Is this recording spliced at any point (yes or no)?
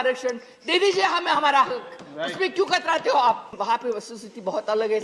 yes